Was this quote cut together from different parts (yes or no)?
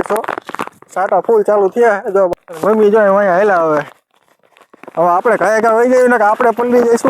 yes